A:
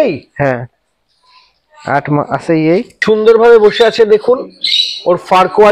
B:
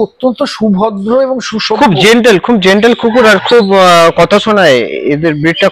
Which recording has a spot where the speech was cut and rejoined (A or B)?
A